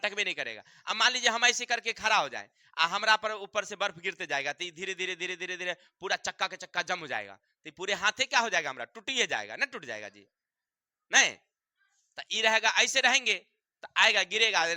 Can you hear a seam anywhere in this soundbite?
no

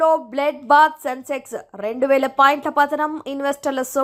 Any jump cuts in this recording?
no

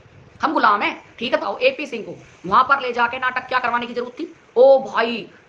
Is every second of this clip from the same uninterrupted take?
no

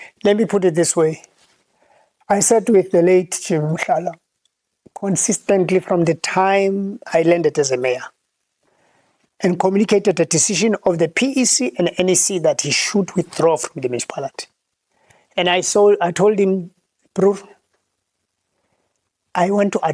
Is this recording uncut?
yes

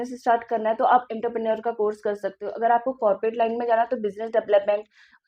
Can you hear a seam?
no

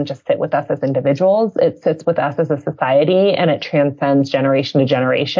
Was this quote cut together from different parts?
no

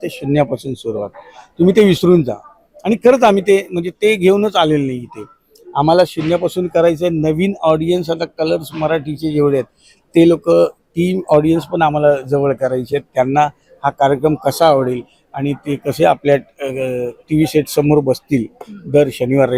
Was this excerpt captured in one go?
yes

